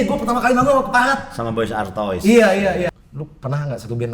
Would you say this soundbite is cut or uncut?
cut